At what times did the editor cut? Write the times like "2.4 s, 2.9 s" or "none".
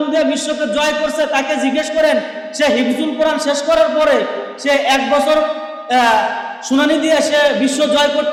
none